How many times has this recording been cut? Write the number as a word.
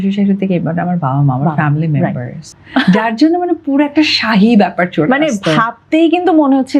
one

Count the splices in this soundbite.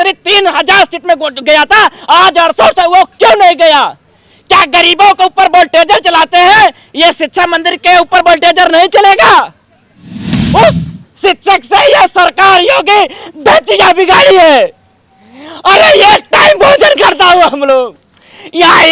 one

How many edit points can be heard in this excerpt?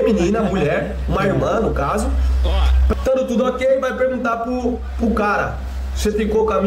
one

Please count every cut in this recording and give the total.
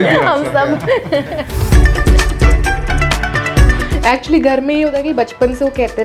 two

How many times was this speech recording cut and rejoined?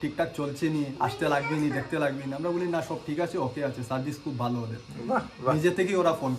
zero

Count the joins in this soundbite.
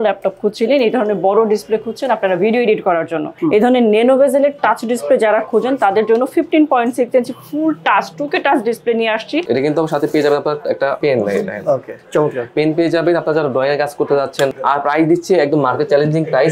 four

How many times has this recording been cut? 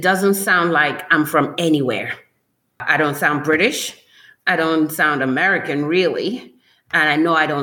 one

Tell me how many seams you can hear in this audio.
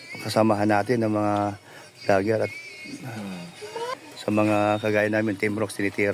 one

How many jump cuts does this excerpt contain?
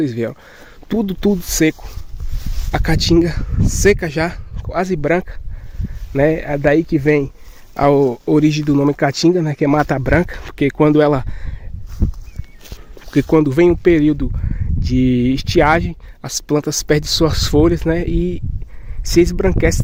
zero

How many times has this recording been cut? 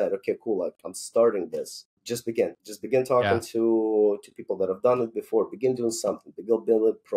one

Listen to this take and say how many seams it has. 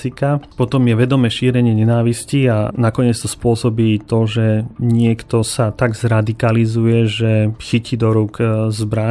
zero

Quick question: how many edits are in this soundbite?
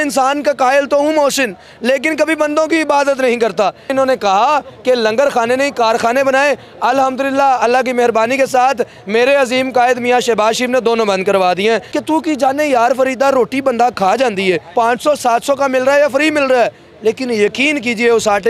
three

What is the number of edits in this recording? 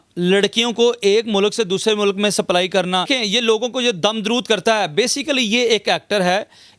one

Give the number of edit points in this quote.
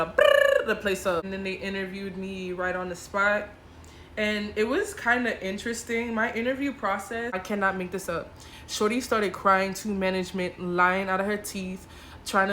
two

